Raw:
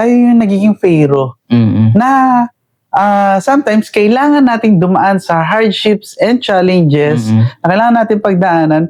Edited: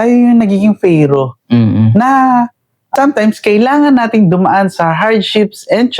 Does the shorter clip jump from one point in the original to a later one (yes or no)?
yes